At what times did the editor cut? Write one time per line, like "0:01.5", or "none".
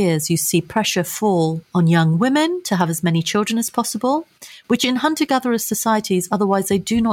none